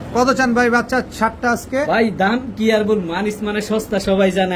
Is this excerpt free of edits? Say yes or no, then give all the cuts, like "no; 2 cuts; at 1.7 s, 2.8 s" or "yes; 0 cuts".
yes; 0 cuts